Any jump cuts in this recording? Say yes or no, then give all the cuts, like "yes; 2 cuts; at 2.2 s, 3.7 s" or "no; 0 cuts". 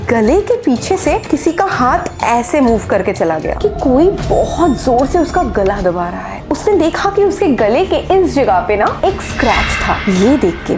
yes; 2 cuts; at 3.5 s, 6.4 s